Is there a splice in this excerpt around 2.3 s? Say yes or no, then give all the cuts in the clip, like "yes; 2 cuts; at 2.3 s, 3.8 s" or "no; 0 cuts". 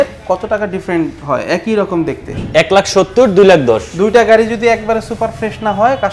yes; 1 cut; at 2.3 s